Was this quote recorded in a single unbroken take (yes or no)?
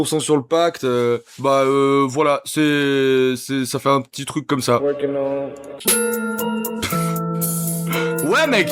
yes